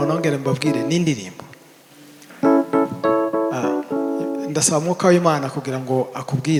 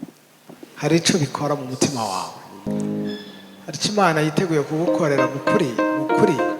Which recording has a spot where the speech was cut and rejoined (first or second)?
second